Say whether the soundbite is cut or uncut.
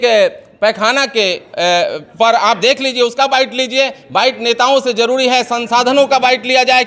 uncut